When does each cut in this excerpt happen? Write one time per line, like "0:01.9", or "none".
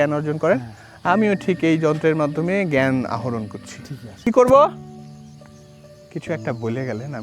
0:04.3
0:04.7
0:06.0